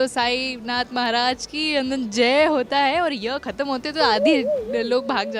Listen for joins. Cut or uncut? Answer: uncut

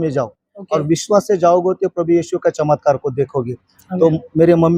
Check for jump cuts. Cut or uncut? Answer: uncut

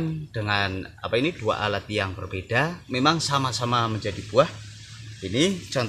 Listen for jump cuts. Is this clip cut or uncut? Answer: cut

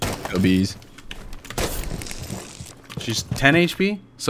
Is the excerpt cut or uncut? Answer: cut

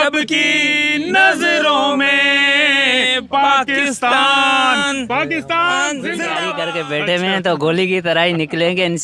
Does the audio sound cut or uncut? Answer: cut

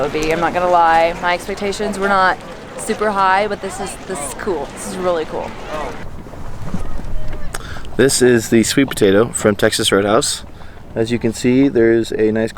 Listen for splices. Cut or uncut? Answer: cut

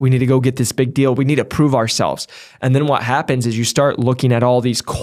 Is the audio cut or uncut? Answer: uncut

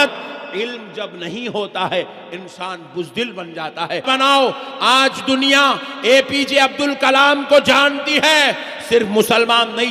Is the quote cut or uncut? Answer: cut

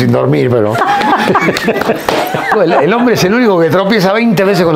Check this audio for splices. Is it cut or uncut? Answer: cut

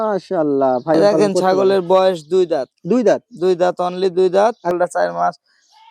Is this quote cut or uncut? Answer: cut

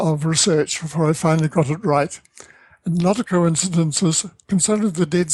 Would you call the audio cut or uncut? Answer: uncut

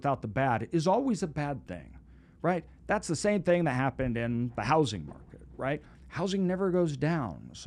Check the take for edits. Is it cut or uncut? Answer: uncut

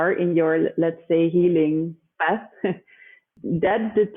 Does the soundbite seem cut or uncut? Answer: cut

